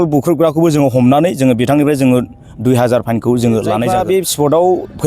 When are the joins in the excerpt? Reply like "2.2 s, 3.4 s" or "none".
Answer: 3.9 s